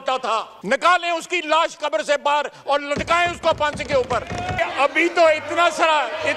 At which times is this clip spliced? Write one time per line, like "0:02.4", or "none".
0:04.5